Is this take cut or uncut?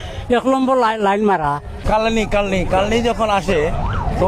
cut